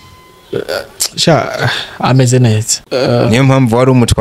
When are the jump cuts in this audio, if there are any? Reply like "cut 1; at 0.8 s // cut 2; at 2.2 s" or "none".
cut 1; at 2.7 s